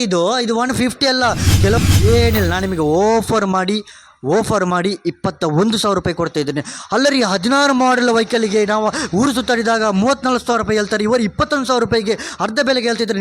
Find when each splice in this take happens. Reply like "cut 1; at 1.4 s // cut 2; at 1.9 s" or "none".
cut 1; at 1.8 s